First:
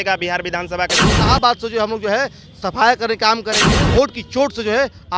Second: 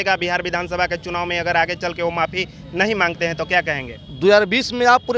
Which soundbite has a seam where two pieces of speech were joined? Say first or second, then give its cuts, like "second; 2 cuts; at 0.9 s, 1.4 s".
first; 2 cuts; at 1.2 s, 3.6 s